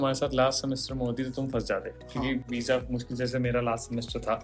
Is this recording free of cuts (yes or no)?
yes